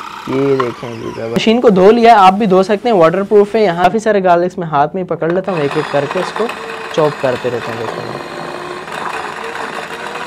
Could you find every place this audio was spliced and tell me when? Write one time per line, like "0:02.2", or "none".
0:01.4
0:03.8